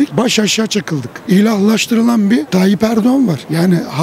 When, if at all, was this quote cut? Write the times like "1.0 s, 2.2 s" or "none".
1.2 s

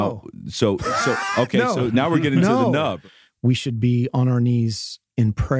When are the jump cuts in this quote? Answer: 3.0 s

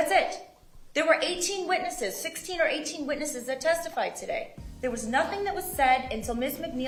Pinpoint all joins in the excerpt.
none

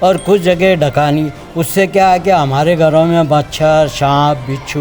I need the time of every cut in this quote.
none

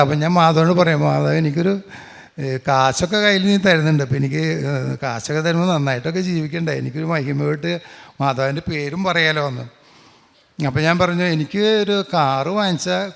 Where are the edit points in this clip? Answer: none

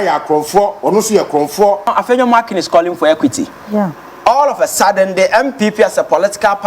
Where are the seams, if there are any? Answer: 1.9 s

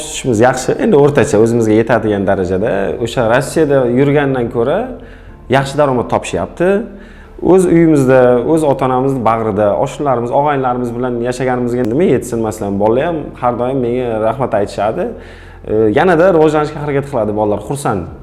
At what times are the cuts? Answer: none

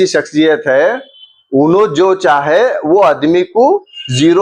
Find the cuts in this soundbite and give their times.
none

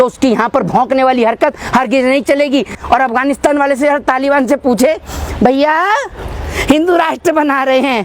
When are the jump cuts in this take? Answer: 2.7 s

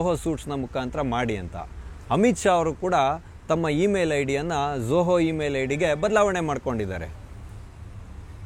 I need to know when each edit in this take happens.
none

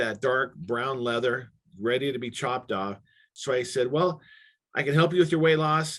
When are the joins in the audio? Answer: 3.3 s

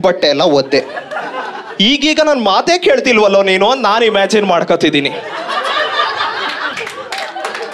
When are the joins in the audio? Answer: 6.7 s

